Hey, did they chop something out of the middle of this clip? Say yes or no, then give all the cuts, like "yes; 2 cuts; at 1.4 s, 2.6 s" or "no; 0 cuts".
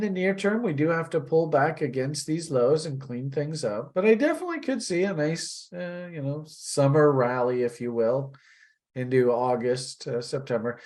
no; 0 cuts